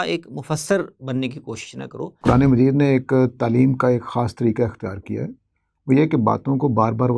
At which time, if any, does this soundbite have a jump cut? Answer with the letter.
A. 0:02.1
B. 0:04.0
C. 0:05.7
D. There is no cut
A